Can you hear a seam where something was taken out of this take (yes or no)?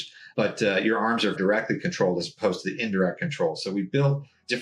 no